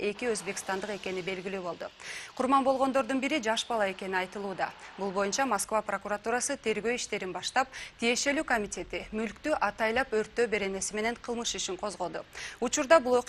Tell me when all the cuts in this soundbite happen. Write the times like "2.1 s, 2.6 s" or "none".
none